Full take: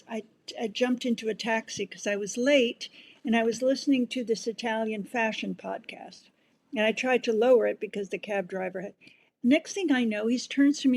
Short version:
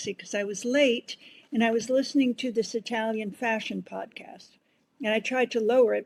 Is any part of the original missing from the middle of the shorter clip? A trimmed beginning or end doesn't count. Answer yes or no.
no